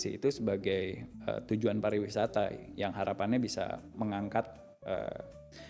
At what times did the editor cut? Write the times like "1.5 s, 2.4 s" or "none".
none